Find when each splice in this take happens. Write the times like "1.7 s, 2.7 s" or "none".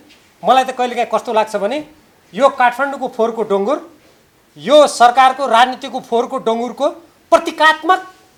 none